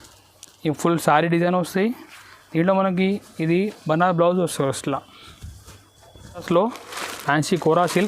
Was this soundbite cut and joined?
yes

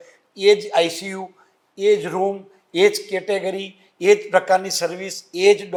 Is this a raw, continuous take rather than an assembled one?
yes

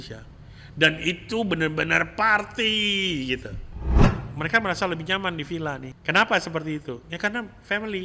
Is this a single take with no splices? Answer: no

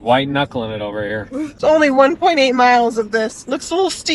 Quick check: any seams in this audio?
yes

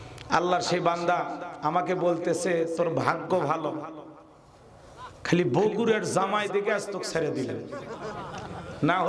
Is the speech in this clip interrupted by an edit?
no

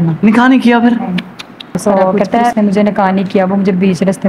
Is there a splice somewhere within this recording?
yes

